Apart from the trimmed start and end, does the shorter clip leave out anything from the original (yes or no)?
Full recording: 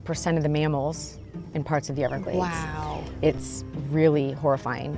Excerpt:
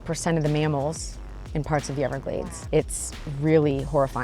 yes